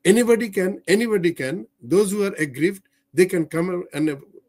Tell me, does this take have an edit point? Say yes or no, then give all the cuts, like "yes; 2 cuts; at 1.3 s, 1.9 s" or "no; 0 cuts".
no; 0 cuts